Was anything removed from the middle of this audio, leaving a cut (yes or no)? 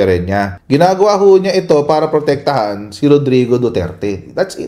no